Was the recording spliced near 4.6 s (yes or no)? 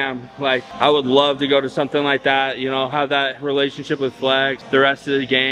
yes